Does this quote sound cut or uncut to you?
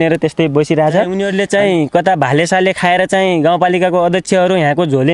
cut